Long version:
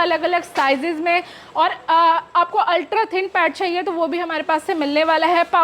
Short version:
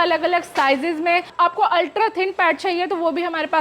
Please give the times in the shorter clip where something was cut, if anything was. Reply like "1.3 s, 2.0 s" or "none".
1.3 s

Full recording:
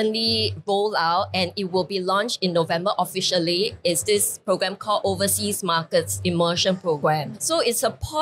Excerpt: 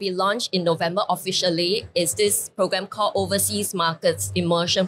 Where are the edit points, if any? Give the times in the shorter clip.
none

